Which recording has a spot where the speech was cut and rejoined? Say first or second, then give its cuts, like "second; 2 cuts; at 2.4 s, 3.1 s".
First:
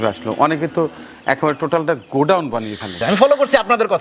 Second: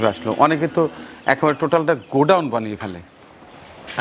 first; 1 cut; at 3.0 s